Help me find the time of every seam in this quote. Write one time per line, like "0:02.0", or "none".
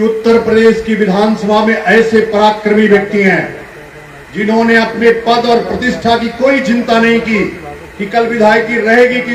none